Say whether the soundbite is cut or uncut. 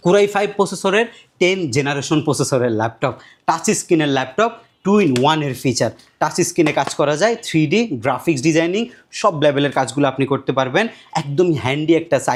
uncut